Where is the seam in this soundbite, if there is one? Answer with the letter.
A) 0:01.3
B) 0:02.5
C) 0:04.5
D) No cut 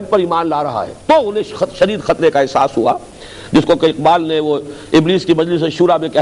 D